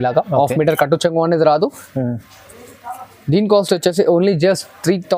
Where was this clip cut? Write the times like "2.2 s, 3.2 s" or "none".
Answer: none